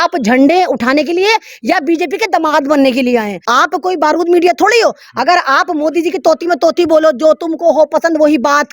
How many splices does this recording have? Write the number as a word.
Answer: one